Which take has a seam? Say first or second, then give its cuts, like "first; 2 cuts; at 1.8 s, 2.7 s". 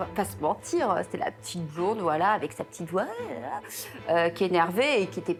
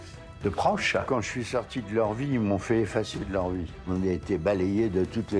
second; 2 cuts; at 1.0 s, 3.7 s